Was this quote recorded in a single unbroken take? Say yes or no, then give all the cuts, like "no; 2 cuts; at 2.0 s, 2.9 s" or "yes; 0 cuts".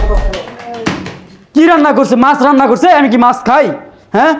yes; 0 cuts